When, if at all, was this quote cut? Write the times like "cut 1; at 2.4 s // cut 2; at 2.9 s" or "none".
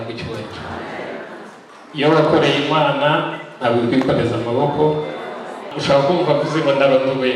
cut 1; at 5.7 s